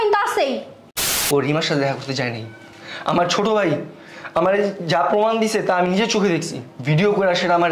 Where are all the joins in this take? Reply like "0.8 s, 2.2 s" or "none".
1.1 s